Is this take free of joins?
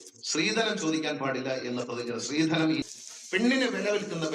no; 1 cut; at 2.8 s

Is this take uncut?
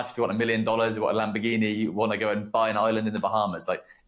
yes; 0 cuts

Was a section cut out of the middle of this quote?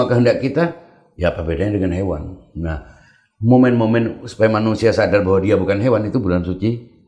no; 0 cuts

